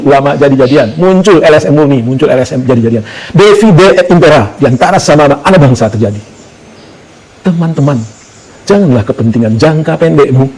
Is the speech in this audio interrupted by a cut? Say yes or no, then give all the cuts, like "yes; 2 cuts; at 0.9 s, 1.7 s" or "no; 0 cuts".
no; 0 cuts